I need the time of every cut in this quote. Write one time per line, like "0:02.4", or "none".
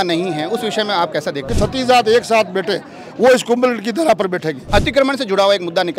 0:01.5
0:04.6

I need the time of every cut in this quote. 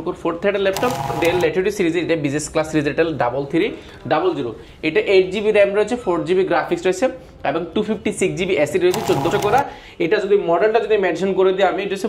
0:01.2
0:09.3

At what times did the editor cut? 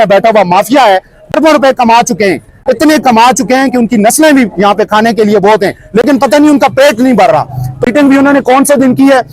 0:01.2
0:07.8

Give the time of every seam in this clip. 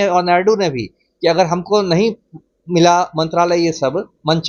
none

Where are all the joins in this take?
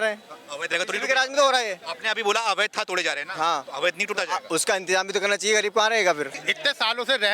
0:06.4

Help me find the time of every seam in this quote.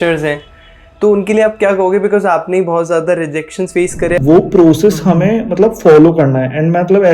0:04.2

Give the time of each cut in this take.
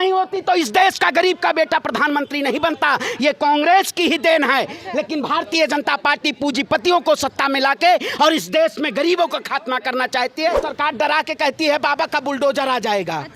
0:10.7

